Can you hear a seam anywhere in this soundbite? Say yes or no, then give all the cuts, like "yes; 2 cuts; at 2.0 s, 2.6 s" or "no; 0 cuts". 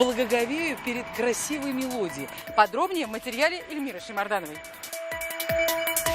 no; 0 cuts